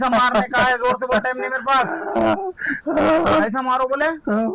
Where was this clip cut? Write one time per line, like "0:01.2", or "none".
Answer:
none

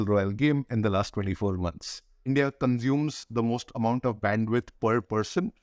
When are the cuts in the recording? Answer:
0:02.2

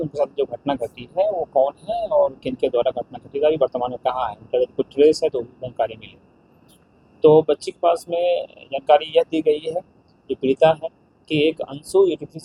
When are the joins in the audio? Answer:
none

